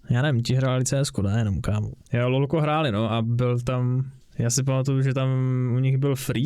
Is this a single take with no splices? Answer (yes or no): no